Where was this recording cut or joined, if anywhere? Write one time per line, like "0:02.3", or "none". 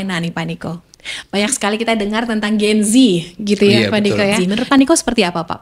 0:04.4